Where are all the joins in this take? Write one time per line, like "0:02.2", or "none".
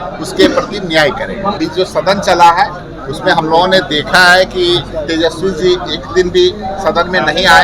0:01.6